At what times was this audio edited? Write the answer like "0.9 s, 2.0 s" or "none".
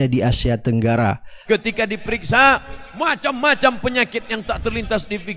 1.3 s